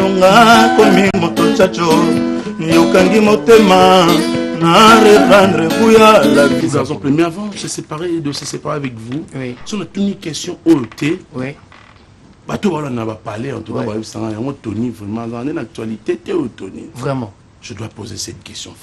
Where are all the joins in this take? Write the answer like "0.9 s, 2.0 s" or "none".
6.6 s